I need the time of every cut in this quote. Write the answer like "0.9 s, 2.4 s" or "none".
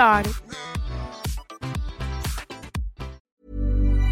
3.2 s